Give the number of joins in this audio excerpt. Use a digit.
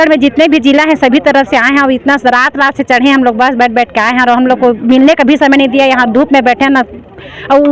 0